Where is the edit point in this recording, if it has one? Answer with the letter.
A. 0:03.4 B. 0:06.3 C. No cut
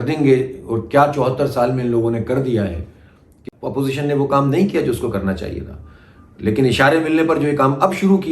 A